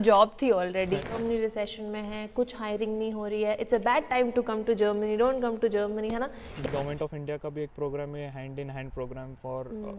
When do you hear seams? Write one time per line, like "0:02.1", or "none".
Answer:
0:01.1
0:06.5